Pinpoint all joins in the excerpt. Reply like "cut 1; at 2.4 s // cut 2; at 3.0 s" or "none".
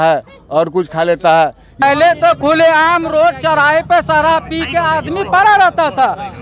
cut 1; at 1.8 s